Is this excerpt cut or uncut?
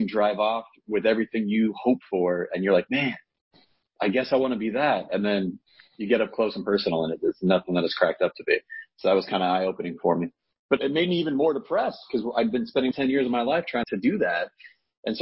cut